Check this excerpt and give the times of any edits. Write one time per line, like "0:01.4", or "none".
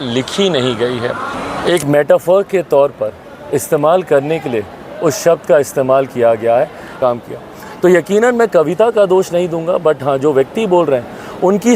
0:01.3
0:07.0